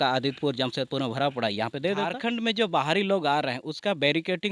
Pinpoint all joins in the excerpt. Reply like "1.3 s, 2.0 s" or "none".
2.1 s